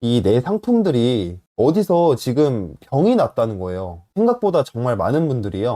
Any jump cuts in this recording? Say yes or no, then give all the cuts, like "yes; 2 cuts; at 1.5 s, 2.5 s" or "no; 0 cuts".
yes; 1 cut; at 4.0 s